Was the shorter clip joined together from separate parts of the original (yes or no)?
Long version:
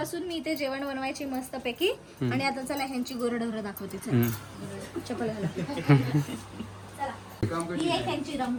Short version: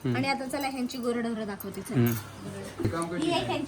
yes